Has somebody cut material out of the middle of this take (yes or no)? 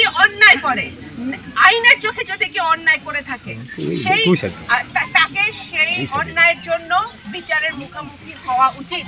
no